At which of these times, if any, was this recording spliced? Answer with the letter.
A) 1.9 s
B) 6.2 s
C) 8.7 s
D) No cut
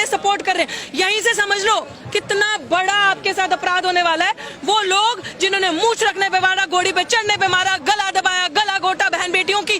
D